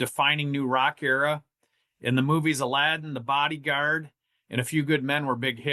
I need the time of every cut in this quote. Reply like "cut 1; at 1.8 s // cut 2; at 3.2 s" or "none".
none